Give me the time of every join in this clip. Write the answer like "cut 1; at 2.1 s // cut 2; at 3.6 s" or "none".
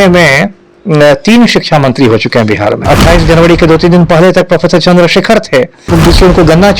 cut 1; at 2.8 s // cut 2; at 5.8 s

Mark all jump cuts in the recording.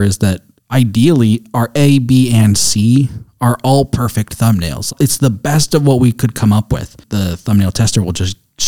cut 1; at 4.9 s // cut 2; at 7.0 s

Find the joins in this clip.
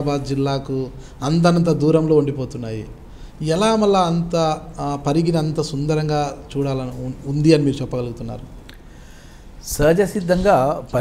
none

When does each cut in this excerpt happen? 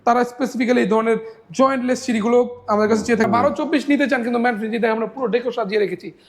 cut 1; at 3.2 s

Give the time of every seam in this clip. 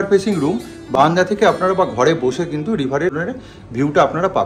cut 1; at 3.2 s

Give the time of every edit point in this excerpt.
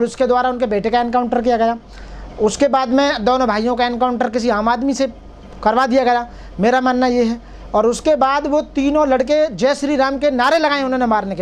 none

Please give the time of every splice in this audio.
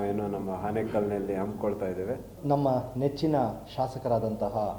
cut 1; at 2.4 s

